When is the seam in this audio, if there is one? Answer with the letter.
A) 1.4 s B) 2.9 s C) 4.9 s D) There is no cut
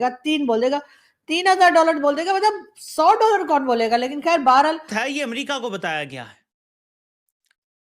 C